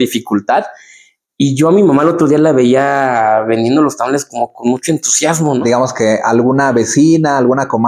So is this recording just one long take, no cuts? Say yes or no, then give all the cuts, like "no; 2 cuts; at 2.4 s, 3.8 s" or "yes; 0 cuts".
no; 1 cut; at 5.6 s